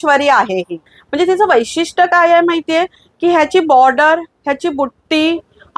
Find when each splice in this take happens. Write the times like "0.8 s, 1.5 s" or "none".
1.0 s

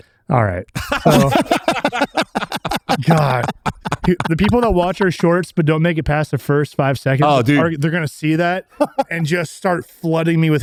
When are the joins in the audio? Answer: none

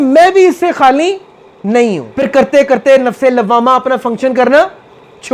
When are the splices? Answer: 2.1 s

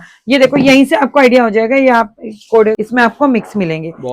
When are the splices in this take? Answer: 2.8 s

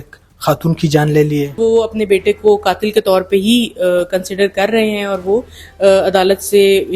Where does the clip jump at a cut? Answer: 1.6 s

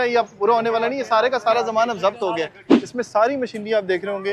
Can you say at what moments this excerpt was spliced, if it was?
2.8 s

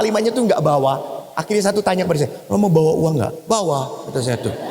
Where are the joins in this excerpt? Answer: none

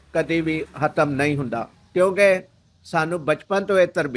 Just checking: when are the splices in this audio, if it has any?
1.8 s

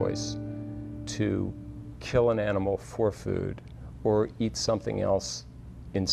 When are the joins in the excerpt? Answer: none

